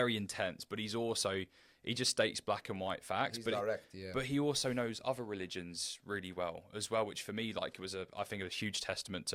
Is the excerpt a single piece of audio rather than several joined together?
yes; 0 cuts

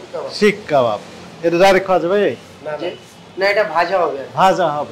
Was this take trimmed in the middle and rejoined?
no; 0 cuts

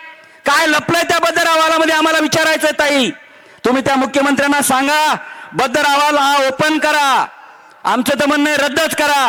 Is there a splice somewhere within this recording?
no; 0 cuts

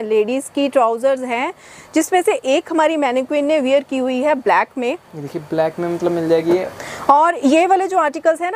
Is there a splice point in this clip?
no; 0 cuts

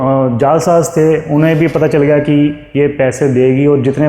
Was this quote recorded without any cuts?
yes; 0 cuts

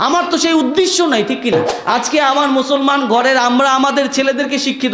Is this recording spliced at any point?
yes; 1 cut; at 1.5 s

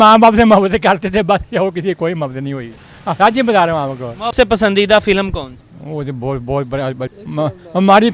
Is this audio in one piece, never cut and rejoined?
no; 2 cuts; at 4.3 s, 7.1 s

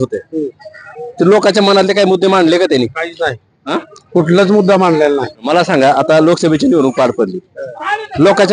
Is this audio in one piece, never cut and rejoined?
no; 1 cut; at 5.4 s

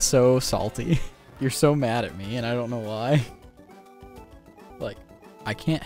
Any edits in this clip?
yes; 2 cuts; at 1.3 s, 4.7 s

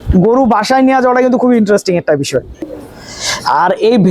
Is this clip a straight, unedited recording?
no; 1 cut; at 2.6 s

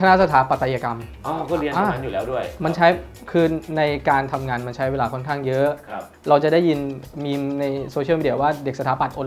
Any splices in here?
no; 0 cuts

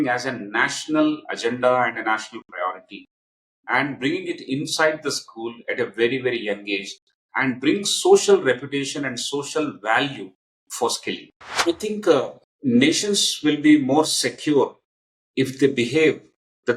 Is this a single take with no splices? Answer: no; 2 cuts; at 11.5 s, 12.4 s

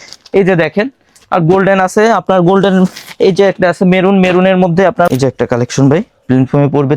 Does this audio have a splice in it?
yes; 1 cut; at 5.1 s

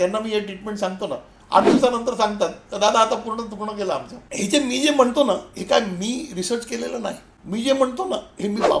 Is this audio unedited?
no; 2 cuts; at 4.2 s, 7.3 s

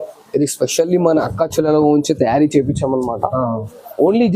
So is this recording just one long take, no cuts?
yes; 0 cuts

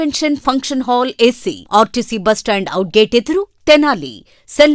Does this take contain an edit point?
no; 0 cuts

